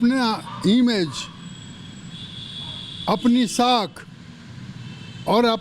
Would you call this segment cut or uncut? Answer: uncut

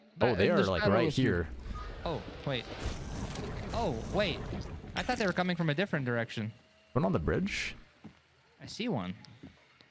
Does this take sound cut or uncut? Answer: uncut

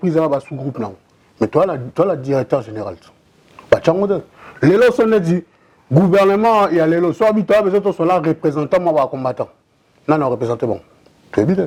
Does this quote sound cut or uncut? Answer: uncut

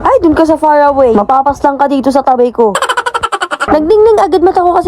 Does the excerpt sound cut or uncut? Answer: cut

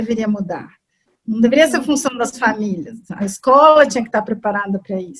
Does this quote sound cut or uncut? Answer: uncut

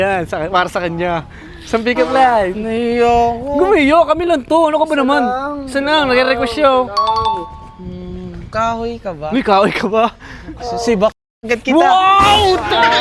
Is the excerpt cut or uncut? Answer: uncut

